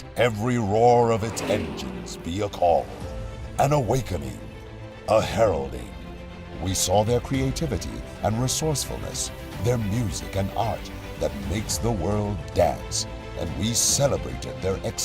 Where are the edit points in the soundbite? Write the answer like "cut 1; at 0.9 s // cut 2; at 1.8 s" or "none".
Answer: cut 1; at 11.7 s